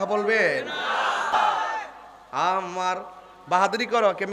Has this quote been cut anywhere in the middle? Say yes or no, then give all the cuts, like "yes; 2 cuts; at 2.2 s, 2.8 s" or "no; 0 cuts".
yes; 1 cut; at 1.3 s